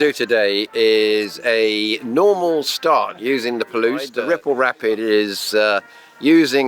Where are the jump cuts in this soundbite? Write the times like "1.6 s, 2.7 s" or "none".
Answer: 4.1 s